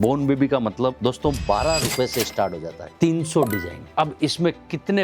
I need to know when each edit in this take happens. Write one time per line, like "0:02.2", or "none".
0:01.0
0:02.8
0:03.8